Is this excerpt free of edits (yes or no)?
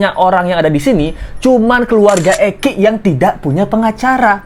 yes